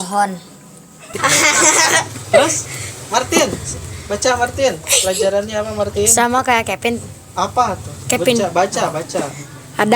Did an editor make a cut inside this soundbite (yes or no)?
yes